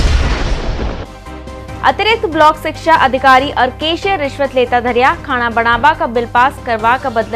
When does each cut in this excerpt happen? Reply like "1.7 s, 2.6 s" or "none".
none